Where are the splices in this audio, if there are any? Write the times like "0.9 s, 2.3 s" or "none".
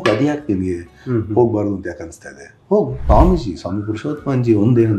3.0 s